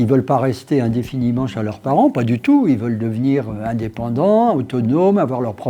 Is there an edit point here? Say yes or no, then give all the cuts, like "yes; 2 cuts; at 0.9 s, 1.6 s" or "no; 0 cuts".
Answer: no; 0 cuts